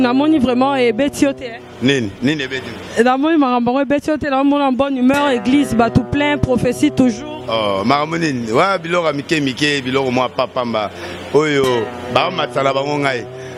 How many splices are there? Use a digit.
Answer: 0